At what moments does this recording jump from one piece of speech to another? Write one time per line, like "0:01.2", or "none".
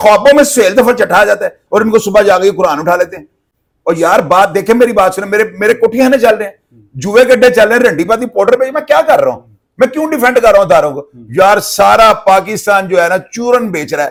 none